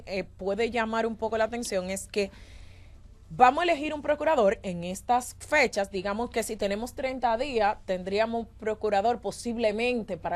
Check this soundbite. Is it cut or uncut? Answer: uncut